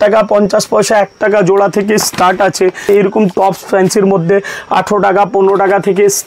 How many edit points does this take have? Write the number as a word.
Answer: one